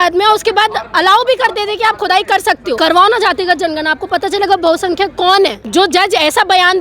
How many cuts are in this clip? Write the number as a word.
two